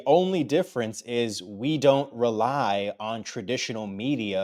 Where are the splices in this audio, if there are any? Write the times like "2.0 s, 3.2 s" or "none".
none